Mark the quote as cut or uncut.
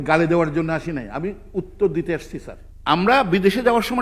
cut